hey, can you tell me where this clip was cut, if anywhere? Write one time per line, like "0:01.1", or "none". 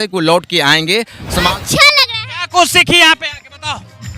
0:01.5